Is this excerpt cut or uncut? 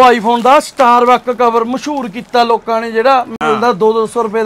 uncut